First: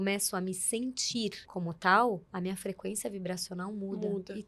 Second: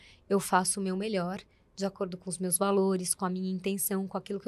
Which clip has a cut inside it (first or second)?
first